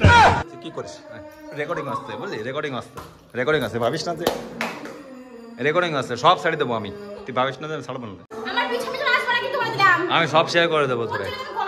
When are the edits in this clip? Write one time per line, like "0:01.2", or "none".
0:08.3